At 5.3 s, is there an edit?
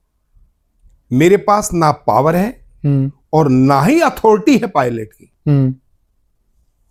no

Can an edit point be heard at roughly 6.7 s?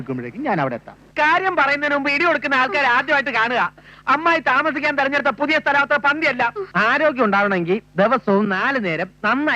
yes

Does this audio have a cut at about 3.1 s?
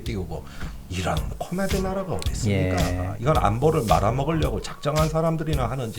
yes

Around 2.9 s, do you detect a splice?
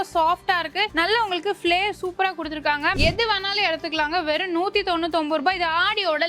yes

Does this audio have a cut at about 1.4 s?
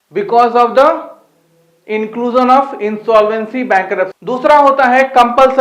no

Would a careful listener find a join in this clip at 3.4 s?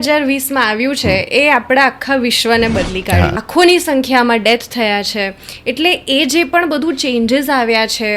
yes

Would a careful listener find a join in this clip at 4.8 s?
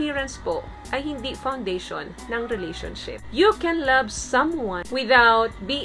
yes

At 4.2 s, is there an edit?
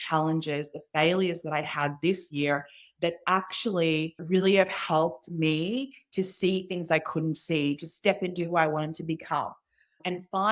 yes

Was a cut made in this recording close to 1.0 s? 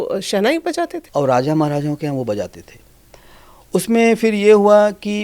yes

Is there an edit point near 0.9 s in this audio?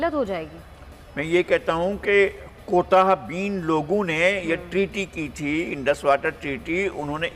no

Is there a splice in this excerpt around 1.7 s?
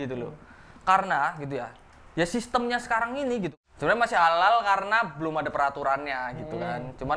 no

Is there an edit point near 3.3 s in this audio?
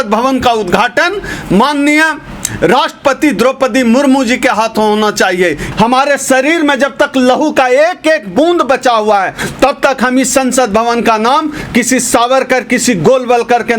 no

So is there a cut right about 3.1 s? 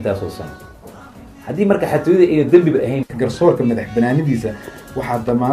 yes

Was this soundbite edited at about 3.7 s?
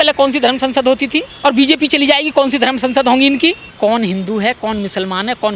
yes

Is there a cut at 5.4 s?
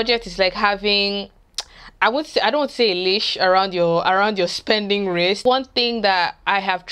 yes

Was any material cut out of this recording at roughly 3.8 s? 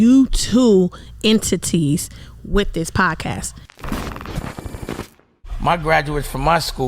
yes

